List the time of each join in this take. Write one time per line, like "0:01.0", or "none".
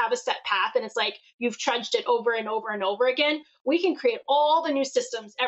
none